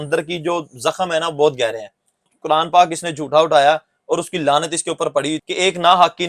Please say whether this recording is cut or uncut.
cut